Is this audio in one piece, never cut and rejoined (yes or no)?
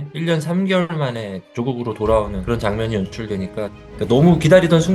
no